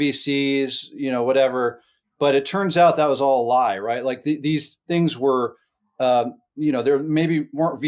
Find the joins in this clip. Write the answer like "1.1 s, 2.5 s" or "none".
none

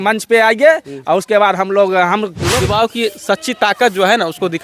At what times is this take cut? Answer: 2.5 s

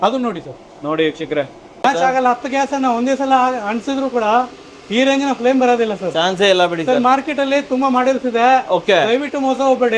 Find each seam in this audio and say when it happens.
1.8 s

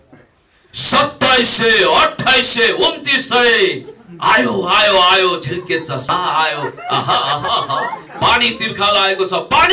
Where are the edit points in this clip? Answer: 6.0 s

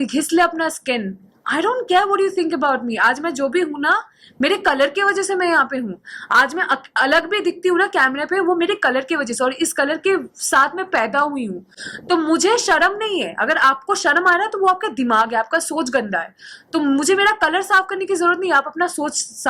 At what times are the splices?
none

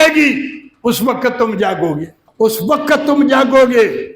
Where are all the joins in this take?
2.2 s

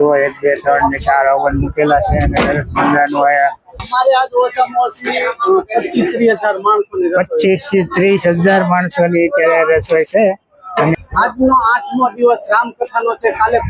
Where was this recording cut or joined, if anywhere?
3.8 s, 10.9 s

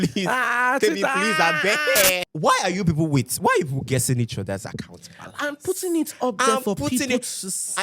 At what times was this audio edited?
2.3 s

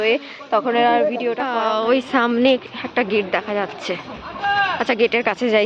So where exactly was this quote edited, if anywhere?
1.5 s

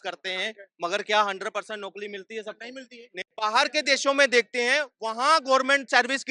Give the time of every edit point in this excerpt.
3.2 s

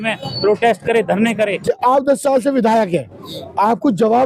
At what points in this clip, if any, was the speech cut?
1.5 s

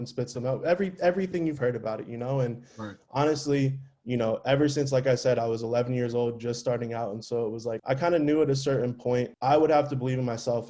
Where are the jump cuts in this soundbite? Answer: none

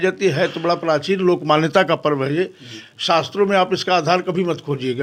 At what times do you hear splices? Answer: none

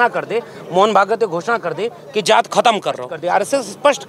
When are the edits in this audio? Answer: 3.1 s

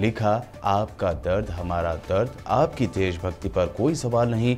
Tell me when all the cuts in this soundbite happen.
none

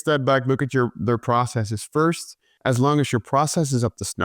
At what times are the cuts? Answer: 2.5 s

